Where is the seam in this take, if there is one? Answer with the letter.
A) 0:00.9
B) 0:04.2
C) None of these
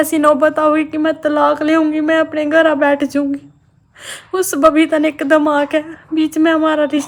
C